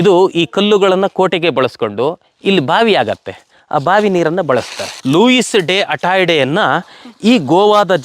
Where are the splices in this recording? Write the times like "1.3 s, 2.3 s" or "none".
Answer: 4.8 s